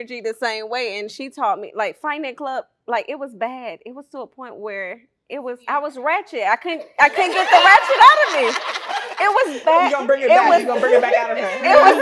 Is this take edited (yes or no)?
no